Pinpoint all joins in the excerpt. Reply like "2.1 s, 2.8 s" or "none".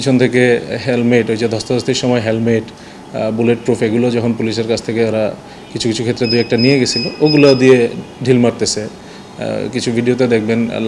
none